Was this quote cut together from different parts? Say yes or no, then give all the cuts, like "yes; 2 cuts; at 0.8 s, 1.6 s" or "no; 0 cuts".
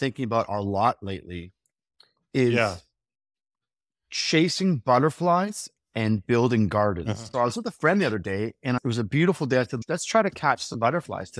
yes; 3 cuts; at 7.2 s, 8.8 s, 9.7 s